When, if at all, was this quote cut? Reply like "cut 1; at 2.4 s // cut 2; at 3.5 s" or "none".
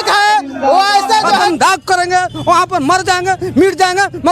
cut 1; at 1.5 s